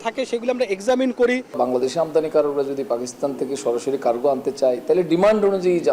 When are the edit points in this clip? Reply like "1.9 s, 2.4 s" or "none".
1.5 s